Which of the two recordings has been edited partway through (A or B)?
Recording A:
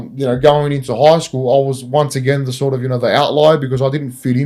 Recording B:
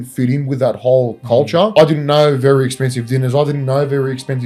B